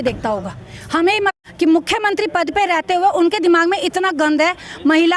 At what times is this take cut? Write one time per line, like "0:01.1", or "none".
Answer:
0:01.3